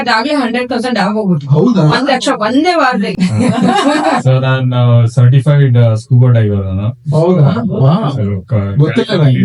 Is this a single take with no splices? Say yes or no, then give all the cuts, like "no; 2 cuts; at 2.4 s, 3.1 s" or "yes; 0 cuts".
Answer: no; 1 cut; at 3.1 s